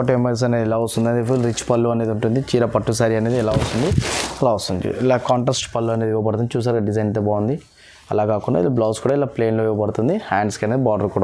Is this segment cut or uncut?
uncut